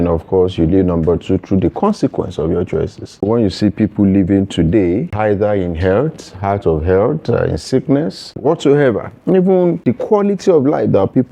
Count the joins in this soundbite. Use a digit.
4